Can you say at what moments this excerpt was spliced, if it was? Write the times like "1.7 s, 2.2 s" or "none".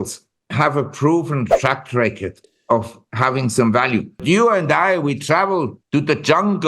4.2 s, 5.8 s